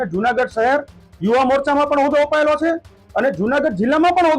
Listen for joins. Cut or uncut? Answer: uncut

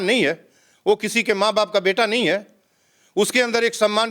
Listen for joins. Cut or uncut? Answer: uncut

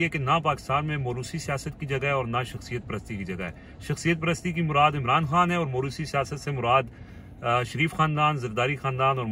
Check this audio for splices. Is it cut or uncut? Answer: uncut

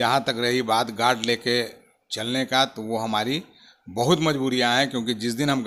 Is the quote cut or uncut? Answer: uncut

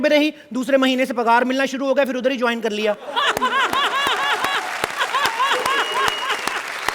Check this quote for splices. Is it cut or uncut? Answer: uncut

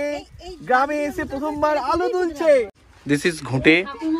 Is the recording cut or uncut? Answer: cut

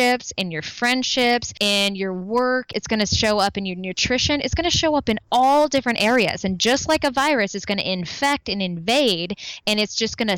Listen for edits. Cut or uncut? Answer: cut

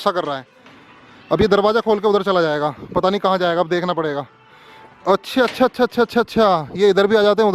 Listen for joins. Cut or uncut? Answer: uncut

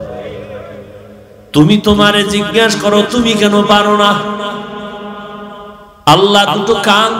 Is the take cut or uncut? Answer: cut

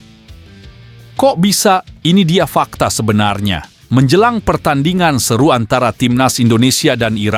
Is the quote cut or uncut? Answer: uncut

